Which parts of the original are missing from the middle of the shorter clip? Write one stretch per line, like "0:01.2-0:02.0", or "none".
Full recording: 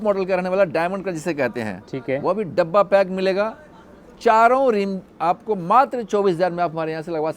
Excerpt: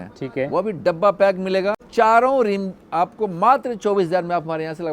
0:03.5-0:04.1

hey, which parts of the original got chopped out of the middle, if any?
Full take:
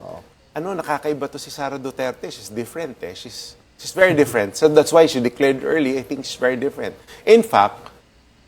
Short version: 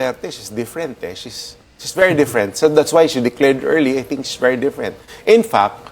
none

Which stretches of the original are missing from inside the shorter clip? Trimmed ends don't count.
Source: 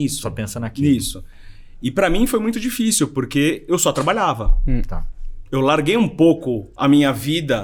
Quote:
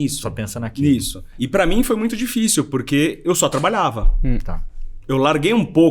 0:01.2-0:01.6

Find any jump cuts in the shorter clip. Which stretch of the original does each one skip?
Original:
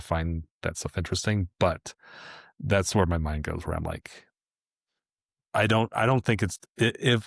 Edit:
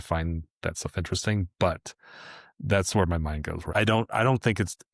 0:03.7-0:05.6

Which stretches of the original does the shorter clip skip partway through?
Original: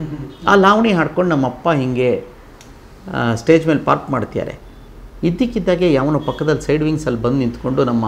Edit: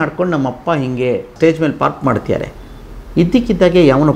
0:02.3-0:03.4

